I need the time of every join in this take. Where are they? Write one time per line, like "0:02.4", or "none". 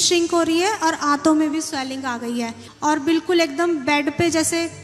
0:02.7